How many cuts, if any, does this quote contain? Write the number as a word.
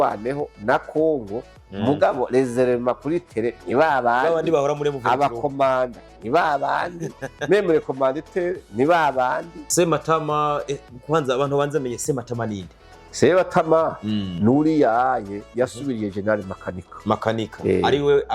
one